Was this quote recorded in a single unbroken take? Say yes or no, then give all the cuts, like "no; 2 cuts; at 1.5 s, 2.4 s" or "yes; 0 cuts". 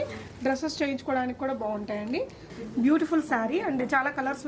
no; 1 cut; at 2.5 s